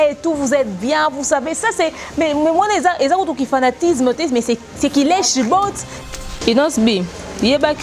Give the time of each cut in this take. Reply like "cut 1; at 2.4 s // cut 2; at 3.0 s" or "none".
cut 1; at 5.9 s